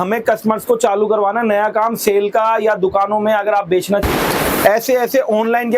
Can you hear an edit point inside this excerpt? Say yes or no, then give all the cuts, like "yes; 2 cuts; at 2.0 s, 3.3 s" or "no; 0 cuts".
yes; 1 cut; at 4.0 s